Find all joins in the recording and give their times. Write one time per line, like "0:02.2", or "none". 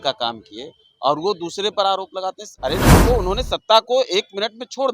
0:02.9